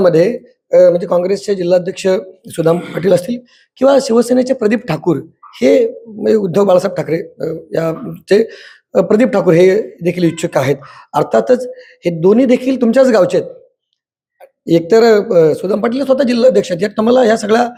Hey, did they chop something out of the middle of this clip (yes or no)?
no